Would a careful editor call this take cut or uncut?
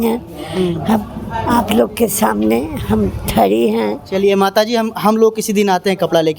uncut